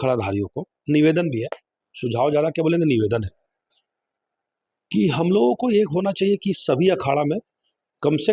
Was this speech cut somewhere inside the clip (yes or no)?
no